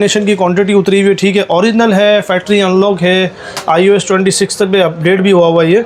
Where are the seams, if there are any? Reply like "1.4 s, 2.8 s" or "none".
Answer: none